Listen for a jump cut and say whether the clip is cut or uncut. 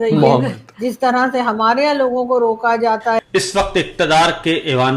cut